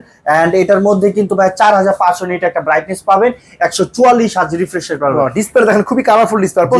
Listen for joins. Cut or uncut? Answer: uncut